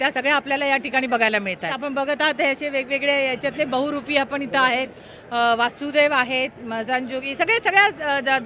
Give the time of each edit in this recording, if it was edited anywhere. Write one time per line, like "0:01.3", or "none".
0:01.8